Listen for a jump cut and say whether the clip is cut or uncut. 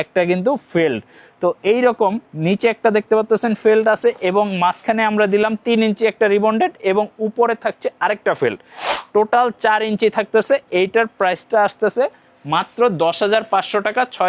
uncut